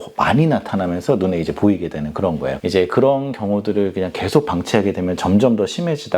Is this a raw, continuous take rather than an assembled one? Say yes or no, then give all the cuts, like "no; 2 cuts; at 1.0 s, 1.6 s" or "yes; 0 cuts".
no; 1 cut; at 2.5 s